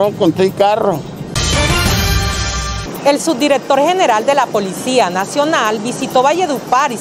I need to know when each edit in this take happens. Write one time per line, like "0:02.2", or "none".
0:01.3
0:02.8